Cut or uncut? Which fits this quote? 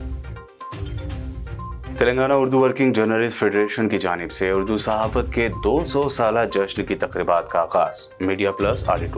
cut